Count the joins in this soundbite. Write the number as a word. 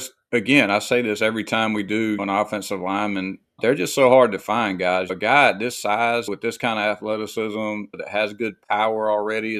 five